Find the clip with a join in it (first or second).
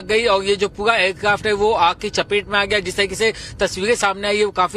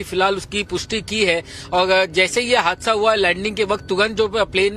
second